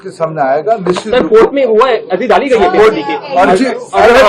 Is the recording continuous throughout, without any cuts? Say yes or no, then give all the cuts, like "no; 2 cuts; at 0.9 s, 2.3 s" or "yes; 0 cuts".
yes; 0 cuts